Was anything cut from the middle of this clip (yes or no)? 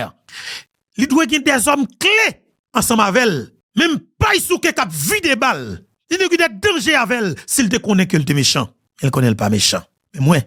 no